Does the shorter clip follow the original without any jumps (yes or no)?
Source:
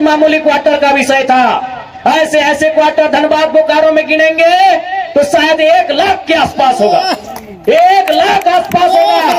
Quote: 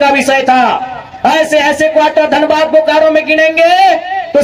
yes